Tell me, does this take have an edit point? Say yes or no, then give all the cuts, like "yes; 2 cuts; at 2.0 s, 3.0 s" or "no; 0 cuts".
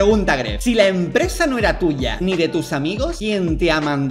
no; 0 cuts